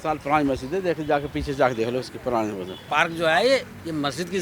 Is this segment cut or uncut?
cut